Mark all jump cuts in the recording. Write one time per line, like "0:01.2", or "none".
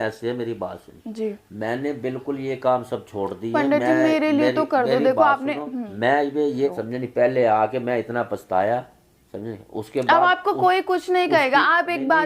0:06.7